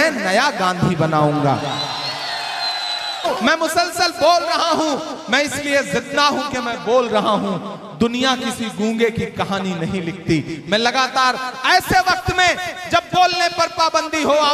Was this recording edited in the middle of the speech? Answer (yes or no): yes